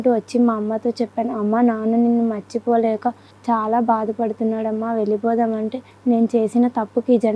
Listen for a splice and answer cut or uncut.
cut